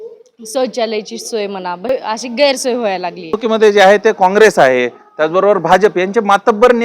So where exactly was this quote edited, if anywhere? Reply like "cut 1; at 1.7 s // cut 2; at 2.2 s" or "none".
cut 1; at 1.9 s // cut 2; at 3.4 s